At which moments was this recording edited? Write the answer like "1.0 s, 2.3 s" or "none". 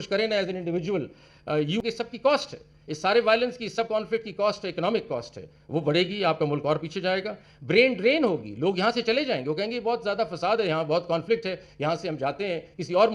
1.8 s